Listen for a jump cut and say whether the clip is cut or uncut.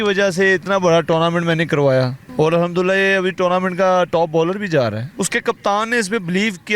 cut